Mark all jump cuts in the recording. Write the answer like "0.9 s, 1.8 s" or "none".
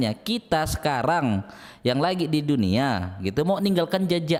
none